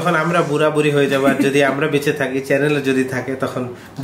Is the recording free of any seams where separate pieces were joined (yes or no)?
yes